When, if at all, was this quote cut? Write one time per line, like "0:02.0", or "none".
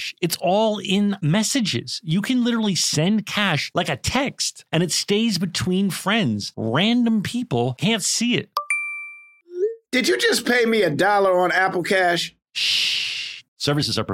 none